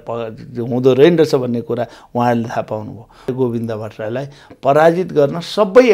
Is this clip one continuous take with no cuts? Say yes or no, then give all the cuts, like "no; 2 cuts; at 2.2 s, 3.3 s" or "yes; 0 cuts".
no; 1 cut; at 3.3 s